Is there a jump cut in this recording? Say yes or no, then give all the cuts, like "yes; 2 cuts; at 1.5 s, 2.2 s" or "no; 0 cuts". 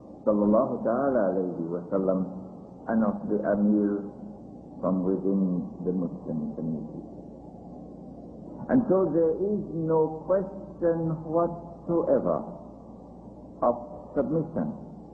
yes; 1 cut; at 13.5 s